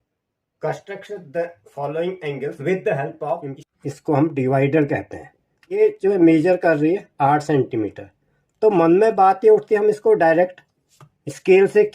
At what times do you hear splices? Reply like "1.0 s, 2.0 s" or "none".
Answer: 3.6 s, 5.8 s